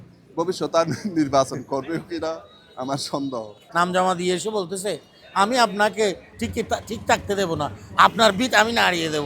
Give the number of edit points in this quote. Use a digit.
2